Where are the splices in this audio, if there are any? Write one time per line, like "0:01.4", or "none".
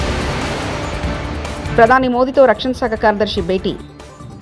0:01.6

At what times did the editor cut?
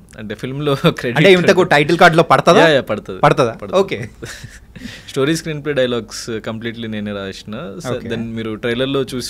none

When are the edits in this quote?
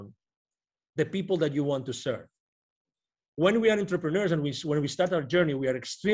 none

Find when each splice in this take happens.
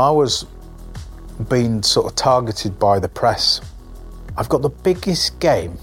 0:04.2

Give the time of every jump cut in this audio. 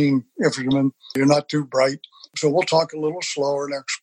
0:01.2
0:02.3

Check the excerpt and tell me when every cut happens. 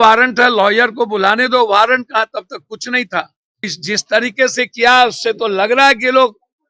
0:03.8

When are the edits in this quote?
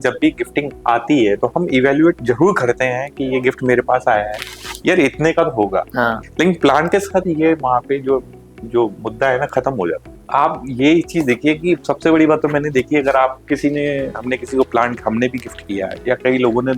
0:06.2
0:10.1

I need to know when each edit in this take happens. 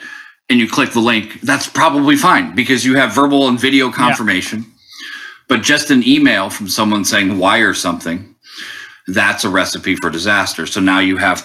none

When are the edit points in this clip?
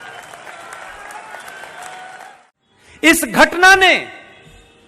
0:02.3

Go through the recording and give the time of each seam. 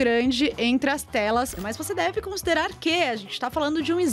0:01.6

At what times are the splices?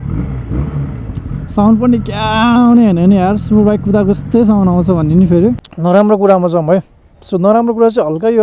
0:05.7

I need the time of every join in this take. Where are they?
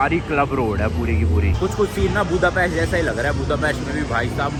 none

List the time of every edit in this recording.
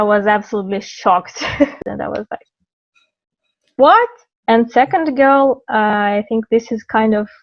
0:01.7
0:04.2

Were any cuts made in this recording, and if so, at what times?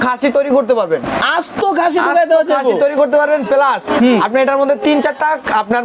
none

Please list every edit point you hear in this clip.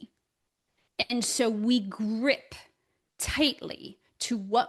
none

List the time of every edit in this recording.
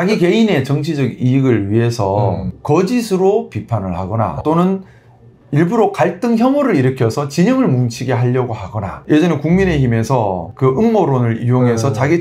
0:04.4

